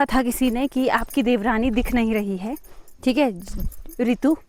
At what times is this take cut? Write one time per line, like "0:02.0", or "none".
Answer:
none